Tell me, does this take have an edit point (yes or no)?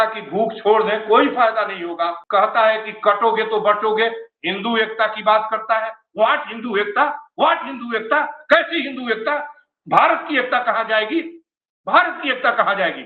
yes